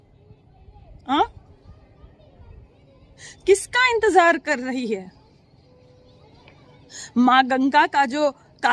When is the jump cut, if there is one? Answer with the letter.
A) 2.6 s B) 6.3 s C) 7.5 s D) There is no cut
D